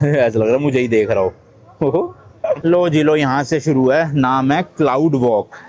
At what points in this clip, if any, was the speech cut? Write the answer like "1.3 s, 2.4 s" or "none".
2.6 s